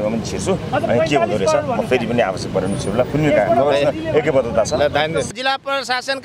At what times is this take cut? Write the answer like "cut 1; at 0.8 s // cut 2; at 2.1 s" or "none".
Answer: cut 1; at 5.3 s